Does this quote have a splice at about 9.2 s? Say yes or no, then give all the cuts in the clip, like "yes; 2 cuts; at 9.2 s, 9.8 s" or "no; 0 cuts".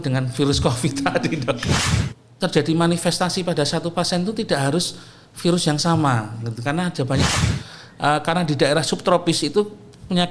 no; 2 cuts; at 1.9 s, 7.4 s